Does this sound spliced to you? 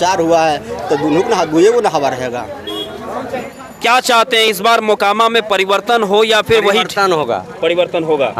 no; 0 cuts

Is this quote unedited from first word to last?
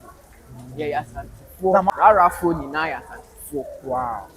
no; 1 cut; at 1.9 s

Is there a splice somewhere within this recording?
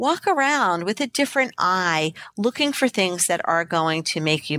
no; 0 cuts

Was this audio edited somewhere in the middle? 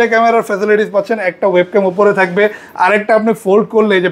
no; 0 cuts

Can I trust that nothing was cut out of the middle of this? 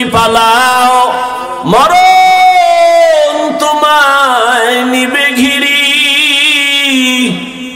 no; 1 cut; at 1.5 s

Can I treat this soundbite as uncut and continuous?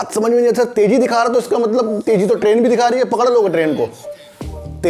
yes; 0 cuts

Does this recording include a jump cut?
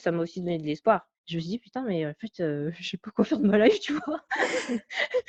no; 0 cuts

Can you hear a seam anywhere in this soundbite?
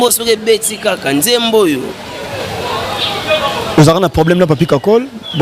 no; 0 cuts

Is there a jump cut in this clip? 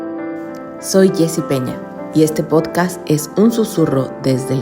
yes; 1 cut; at 0.9 s

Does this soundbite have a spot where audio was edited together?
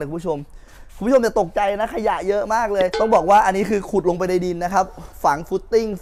yes; 1 cut; at 2.9 s

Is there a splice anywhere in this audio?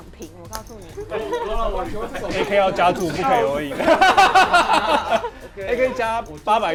no; 0 cuts

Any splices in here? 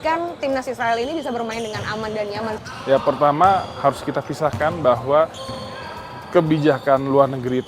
no; 0 cuts

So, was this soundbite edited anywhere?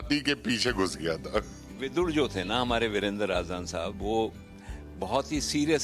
yes; 1 cut; at 1.8 s

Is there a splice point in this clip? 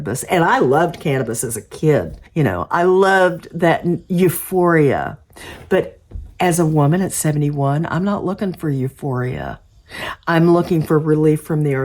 yes; 1 cut; at 2.2 s

